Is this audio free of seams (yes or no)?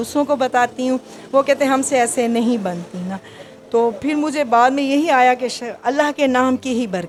yes